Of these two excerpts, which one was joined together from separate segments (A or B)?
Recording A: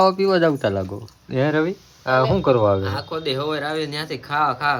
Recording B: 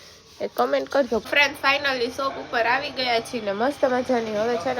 B